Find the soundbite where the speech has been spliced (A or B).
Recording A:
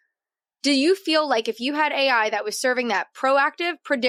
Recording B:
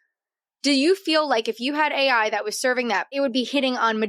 B